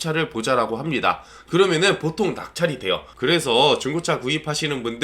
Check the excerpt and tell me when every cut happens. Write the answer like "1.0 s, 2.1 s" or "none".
3.1 s